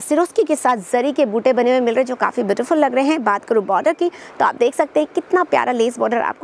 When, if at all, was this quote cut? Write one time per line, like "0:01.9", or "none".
none